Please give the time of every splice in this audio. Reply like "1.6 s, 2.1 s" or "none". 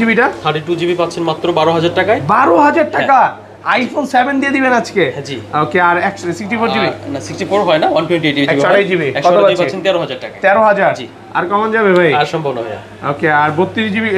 none